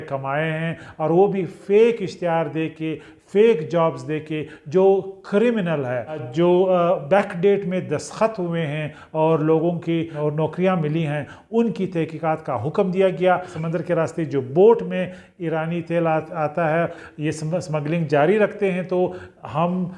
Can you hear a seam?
yes; 4 cuts; at 6.3 s, 10.2 s, 13.6 s, 17.0 s

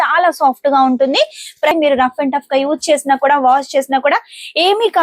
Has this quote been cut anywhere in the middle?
yes; 1 cut; at 1.7 s

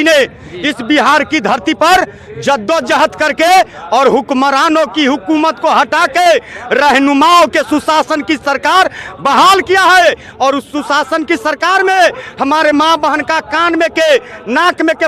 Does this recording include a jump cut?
no; 0 cuts

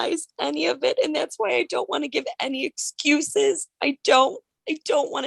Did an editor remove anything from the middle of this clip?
no; 0 cuts

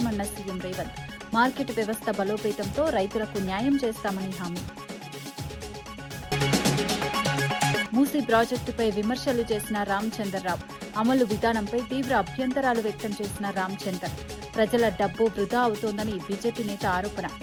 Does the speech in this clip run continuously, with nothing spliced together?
yes; 0 cuts

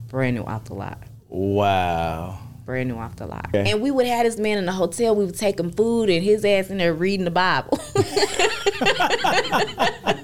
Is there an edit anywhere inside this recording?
yes; 1 cut; at 3.5 s

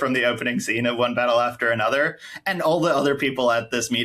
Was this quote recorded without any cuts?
yes; 0 cuts

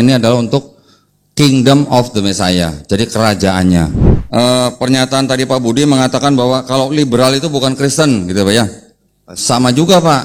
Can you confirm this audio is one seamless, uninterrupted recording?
no; 1 cut; at 4.0 s

